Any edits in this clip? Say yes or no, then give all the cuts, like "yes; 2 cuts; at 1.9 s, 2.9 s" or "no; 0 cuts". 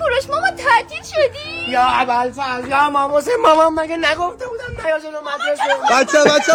no; 0 cuts